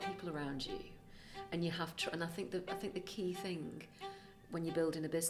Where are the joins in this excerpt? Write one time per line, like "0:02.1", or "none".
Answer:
none